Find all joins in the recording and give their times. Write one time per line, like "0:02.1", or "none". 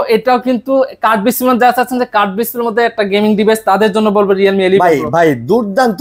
none